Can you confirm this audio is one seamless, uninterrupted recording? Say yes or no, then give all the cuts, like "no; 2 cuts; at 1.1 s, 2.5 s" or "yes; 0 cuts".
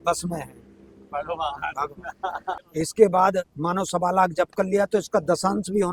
yes; 0 cuts